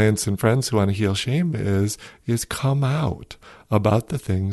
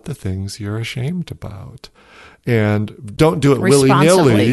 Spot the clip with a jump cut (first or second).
second